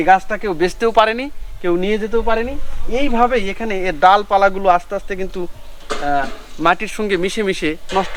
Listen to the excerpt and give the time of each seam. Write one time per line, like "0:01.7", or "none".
none